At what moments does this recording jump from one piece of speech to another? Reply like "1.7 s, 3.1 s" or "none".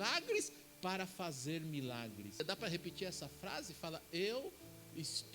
2.4 s